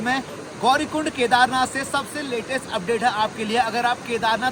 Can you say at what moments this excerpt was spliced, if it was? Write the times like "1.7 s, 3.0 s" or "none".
none